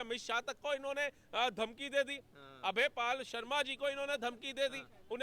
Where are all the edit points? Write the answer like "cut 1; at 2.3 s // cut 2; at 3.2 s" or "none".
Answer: none